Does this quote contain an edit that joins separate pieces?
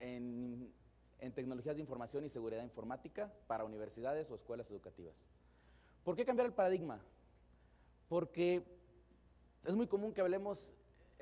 yes; 1 cut; at 8.0 s

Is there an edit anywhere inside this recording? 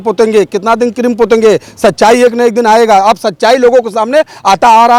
no; 0 cuts

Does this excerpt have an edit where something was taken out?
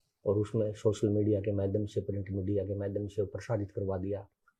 no; 0 cuts

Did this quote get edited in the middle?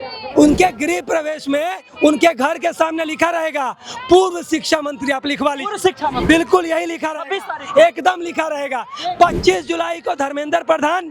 no; 0 cuts

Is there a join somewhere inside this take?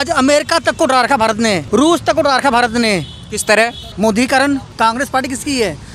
yes; 3 cuts; at 1.6 s, 3.8 s, 4.7 s

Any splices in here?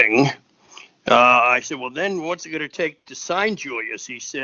no; 0 cuts

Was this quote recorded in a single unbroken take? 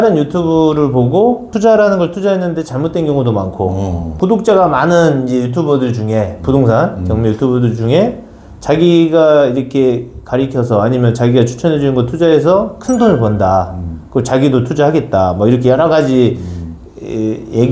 no; 2 cuts; at 1.5 s, 4.1 s

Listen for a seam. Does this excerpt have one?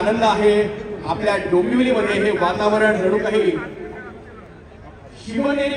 no; 0 cuts

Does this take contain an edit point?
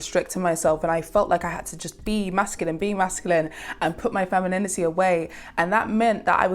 no; 0 cuts

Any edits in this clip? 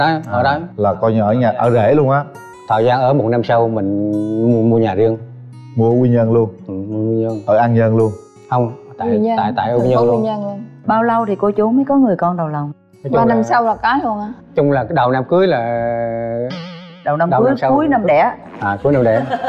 no; 0 cuts

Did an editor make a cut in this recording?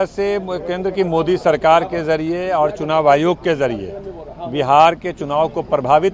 no; 0 cuts

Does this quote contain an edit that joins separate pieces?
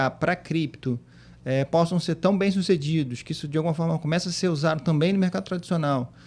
no; 0 cuts

